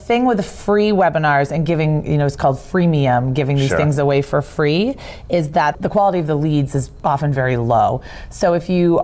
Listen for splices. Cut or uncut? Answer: uncut